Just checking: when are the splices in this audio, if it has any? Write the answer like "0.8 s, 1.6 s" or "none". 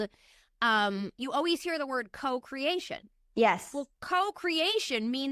none